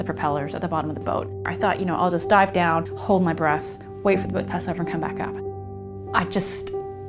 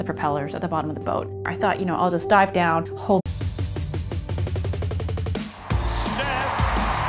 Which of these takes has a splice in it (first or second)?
first